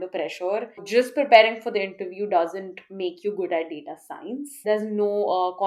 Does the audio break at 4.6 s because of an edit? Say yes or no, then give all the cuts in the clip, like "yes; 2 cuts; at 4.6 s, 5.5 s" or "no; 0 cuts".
yes; 2 cuts; at 0.8 s, 4.6 s